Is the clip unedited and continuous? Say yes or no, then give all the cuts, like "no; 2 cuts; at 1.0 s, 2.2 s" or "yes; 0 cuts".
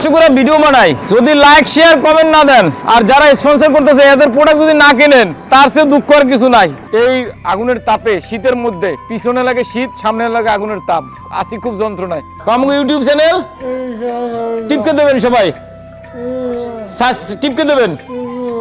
no; 4 cuts; at 1.0 s, 2.8 s, 6.8 s, 12.3 s